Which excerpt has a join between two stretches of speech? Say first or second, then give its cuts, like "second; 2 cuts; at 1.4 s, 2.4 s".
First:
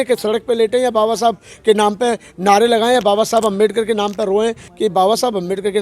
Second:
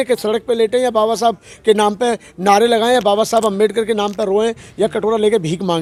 first; 1 cut; at 4.6 s